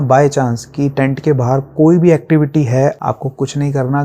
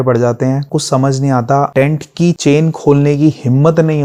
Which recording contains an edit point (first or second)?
first